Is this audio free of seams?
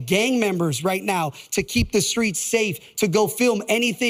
yes; 0 cuts

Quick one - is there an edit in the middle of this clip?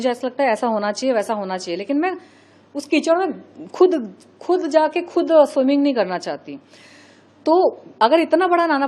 no; 0 cuts

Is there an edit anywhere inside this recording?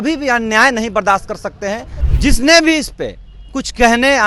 yes; 1 cut; at 2.0 s

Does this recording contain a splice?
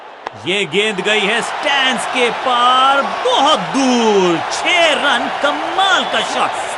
no; 0 cuts

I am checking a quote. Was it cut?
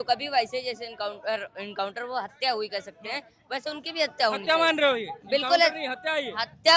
no; 0 cuts

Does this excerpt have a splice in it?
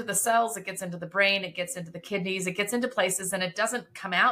no; 0 cuts

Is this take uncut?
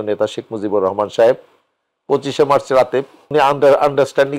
no; 1 cut; at 3.3 s

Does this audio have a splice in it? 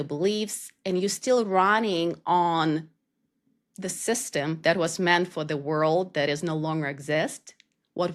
no; 0 cuts

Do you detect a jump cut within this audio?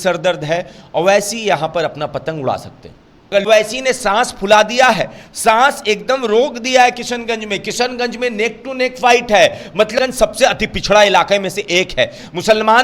yes; 2 cuts; at 3.5 s, 10.0 s

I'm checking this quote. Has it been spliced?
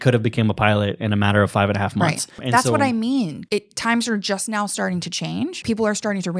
yes; 3 cuts; at 2.4 s, 3.4 s, 5.6 s

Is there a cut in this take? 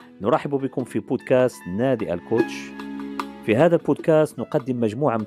no; 0 cuts

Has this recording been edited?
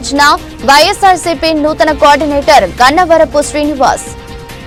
no; 0 cuts

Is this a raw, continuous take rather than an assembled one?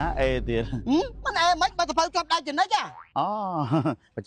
yes; 0 cuts

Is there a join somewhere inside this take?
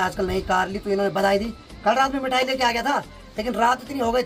no; 0 cuts

